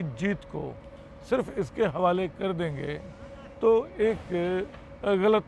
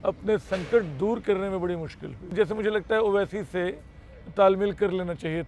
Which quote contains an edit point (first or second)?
second